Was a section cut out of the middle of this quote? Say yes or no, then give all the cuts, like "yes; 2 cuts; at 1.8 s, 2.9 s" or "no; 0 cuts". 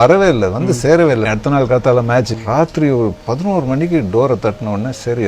yes; 2 cuts; at 1.3 s, 2.3 s